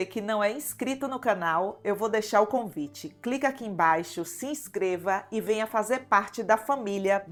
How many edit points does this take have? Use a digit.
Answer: 0